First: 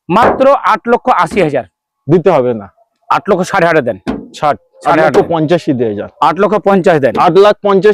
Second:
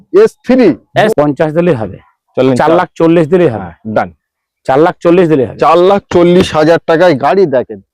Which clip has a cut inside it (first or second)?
second